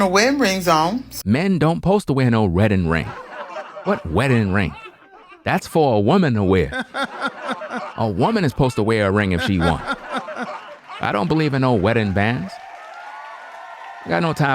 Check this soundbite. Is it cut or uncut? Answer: uncut